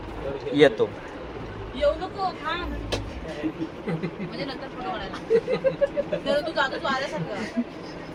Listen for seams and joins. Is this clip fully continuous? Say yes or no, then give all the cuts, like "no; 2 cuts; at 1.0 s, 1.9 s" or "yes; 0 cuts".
yes; 0 cuts